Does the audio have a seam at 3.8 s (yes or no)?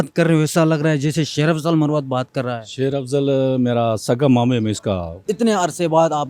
no